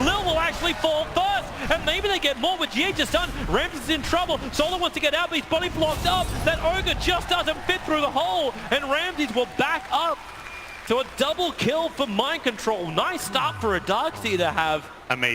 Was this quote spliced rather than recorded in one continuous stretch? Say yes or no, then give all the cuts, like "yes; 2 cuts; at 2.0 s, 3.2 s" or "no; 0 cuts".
yes; 1 cut; at 8.8 s